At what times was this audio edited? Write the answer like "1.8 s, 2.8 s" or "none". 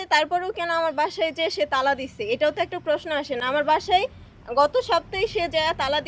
none